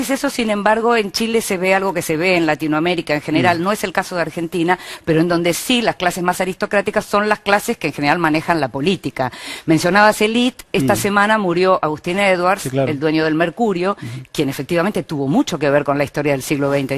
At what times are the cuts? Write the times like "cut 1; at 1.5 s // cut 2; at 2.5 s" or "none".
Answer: none